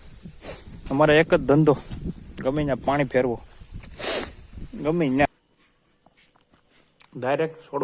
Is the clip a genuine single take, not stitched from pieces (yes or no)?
no